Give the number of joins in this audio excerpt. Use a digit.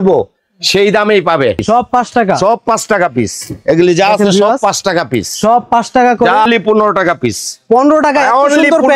2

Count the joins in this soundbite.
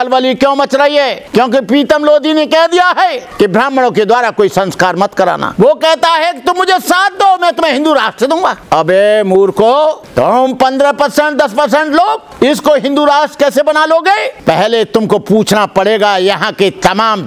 7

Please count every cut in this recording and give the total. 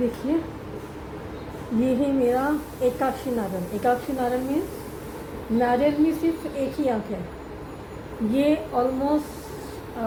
0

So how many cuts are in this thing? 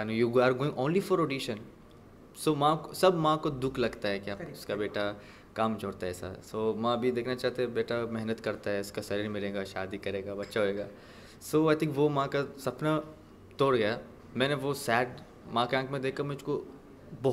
0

